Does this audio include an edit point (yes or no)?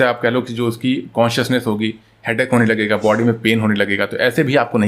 no